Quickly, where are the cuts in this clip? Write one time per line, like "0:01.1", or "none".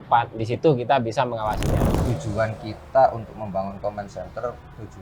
0:01.8